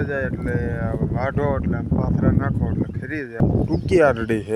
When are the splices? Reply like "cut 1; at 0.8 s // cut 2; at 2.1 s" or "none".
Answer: cut 1; at 3.4 s